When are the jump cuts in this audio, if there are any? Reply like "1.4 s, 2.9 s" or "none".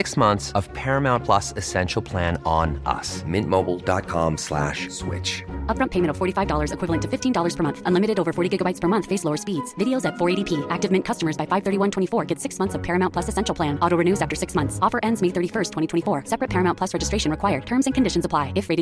none